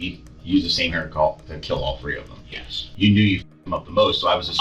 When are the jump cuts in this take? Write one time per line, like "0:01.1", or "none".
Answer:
0:02.8